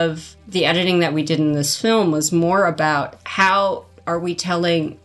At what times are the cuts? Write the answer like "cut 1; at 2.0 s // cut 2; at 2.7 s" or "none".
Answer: none